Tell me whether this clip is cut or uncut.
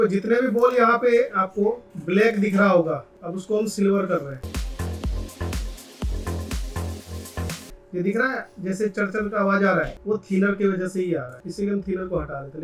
uncut